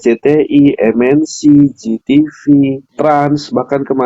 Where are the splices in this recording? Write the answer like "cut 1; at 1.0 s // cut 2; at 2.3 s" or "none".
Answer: cut 1; at 2.9 s

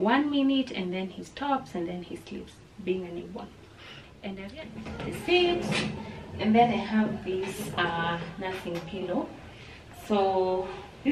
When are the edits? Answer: cut 1; at 4.4 s

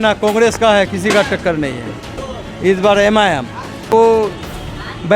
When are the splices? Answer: cut 1; at 2.2 s // cut 2; at 3.9 s

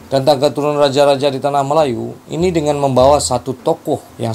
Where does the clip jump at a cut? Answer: none

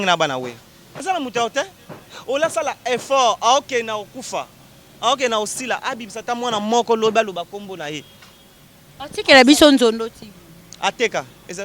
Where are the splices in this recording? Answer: cut 1; at 1.0 s

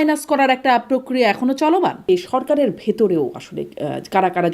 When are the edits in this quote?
cut 1; at 2.1 s

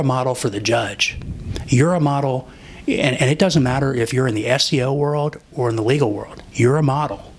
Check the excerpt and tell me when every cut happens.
none

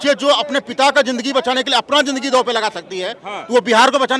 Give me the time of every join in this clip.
none

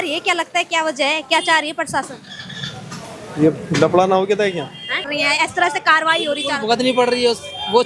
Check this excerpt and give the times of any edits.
cut 1; at 5.1 s

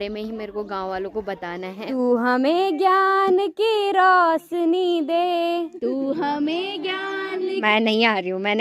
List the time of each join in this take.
cut 1; at 1.8 s // cut 2; at 7.6 s

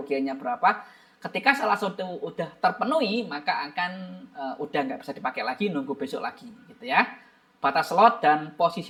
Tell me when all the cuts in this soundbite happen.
none

